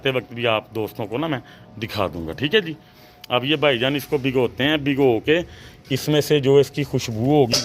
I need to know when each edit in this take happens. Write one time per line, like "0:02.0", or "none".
none